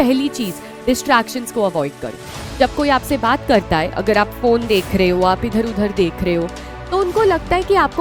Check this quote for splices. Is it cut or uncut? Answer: uncut